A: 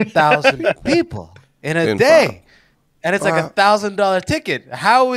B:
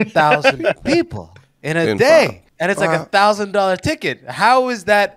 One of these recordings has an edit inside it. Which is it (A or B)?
B